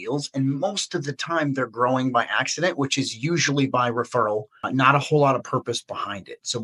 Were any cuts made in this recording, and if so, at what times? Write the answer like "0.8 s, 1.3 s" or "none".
4.6 s